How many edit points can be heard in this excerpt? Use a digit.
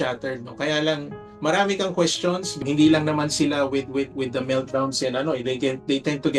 2